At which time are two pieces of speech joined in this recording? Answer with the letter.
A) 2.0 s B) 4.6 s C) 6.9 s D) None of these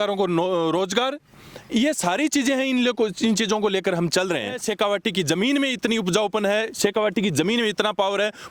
B